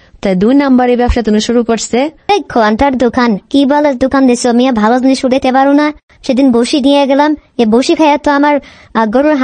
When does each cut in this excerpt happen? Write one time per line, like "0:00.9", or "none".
0:02.2